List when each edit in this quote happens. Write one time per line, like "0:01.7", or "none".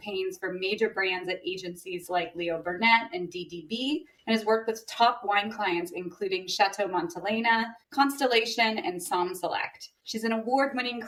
none